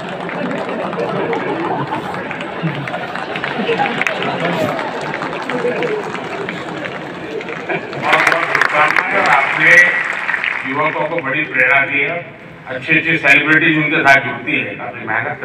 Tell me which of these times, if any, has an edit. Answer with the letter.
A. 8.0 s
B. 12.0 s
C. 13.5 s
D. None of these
A